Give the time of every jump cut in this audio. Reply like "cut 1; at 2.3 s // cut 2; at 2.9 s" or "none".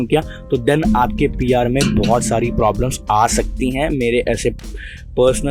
none